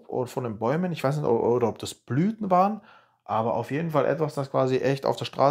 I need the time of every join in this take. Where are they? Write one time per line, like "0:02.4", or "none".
none